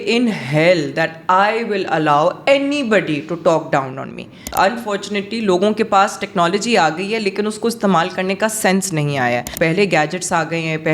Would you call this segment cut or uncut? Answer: cut